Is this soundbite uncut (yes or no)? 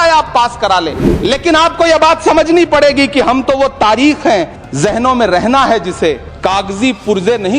no